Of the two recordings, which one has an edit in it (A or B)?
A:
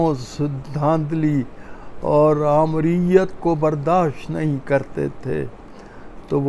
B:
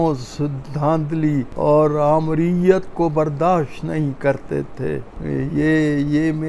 B